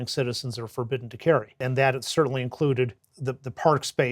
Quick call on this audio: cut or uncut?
cut